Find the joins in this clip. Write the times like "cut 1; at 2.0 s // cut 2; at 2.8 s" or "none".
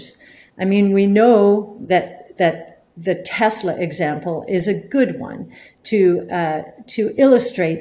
none